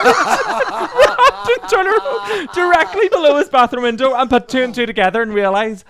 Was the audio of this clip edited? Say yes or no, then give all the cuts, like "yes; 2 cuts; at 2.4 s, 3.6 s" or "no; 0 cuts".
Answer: no; 0 cuts